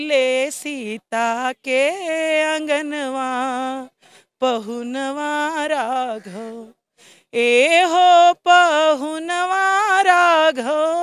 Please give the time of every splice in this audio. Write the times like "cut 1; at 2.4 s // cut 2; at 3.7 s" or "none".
none